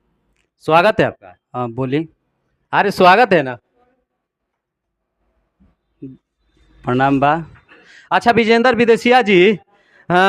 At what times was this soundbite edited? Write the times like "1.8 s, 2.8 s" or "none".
7.9 s